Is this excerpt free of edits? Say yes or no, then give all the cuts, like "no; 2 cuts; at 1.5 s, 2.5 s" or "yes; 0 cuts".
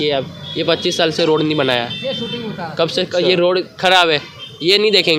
yes; 0 cuts